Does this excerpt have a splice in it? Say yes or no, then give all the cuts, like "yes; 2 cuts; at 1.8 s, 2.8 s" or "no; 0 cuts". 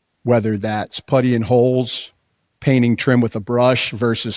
no; 0 cuts